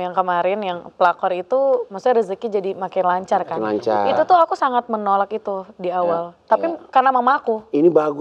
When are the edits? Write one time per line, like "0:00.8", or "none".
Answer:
none